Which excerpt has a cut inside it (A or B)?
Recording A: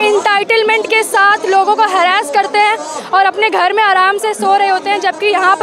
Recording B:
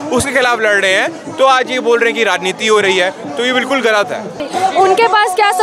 B